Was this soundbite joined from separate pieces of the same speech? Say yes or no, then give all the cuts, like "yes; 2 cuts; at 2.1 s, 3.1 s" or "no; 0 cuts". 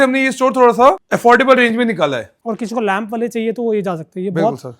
yes; 2 cuts; at 1.0 s, 2.3 s